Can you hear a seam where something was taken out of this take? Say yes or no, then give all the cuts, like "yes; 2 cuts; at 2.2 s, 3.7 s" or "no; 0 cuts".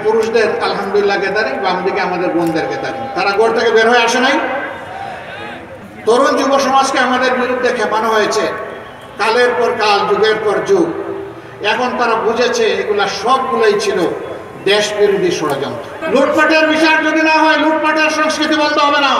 yes; 2 cuts; at 5.8 s, 15.9 s